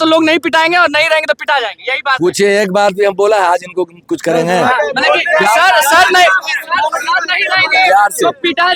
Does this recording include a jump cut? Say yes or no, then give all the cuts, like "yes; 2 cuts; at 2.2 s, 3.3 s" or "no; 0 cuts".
no; 0 cuts